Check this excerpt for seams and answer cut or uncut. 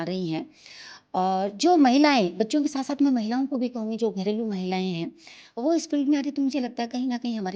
uncut